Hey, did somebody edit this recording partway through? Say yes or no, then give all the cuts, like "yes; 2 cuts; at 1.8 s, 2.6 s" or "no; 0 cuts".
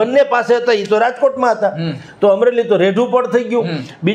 no; 0 cuts